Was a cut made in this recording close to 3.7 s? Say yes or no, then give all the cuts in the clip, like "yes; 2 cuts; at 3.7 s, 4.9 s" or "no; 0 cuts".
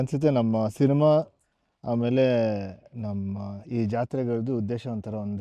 no; 0 cuts